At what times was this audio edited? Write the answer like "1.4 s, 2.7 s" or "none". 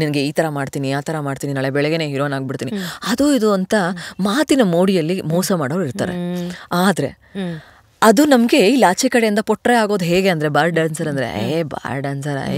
none